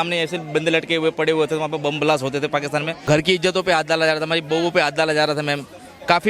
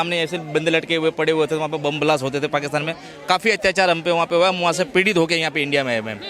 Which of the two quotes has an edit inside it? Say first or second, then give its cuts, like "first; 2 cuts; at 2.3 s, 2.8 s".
first; 1 cut; at 3.0 s